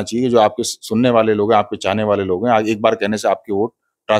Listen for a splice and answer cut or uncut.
uncut